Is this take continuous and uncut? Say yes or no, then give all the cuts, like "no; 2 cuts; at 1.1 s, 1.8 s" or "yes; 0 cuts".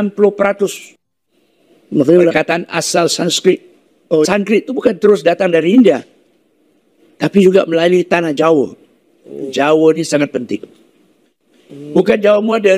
no; 1 cut; at 9.5 s